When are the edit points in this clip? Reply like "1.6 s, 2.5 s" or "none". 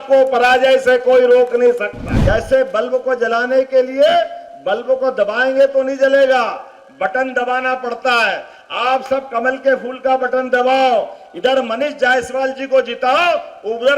2.1 s